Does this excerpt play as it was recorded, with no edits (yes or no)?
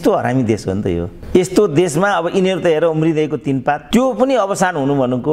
no